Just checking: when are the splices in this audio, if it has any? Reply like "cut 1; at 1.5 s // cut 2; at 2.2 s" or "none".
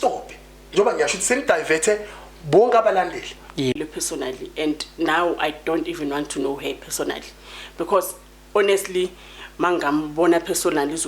cut 1; at 3.8 s